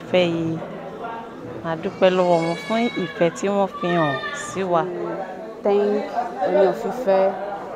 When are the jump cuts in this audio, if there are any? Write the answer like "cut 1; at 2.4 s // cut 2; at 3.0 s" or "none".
cut 1; at 5.0 s